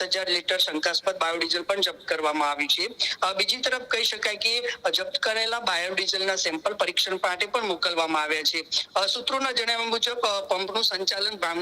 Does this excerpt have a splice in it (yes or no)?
no